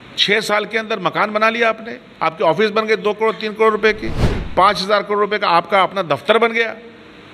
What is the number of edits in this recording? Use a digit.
0